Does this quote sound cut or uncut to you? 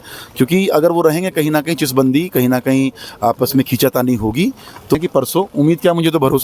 cut